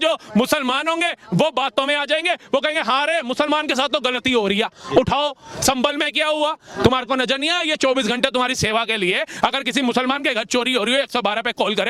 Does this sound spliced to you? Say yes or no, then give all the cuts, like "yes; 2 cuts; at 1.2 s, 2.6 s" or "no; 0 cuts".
no; 0 cuts